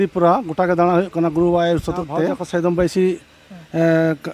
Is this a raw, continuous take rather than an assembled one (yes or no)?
no